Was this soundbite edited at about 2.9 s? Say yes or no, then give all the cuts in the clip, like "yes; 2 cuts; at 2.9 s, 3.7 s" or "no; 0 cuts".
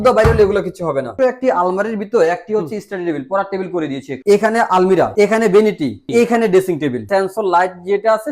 no; 5 cuts; at 1.1 s, 4.1 s, 5.1 s, 6.0 s, 7.0 s